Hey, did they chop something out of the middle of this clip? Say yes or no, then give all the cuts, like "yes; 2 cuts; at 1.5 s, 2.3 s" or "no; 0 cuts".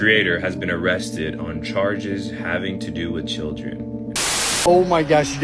yes; 1 cut; at 4.2 s